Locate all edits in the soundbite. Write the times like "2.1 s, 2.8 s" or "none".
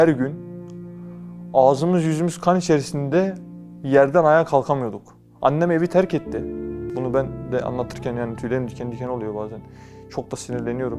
6.9 s